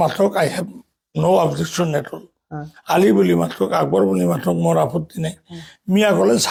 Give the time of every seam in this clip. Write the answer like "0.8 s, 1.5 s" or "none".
none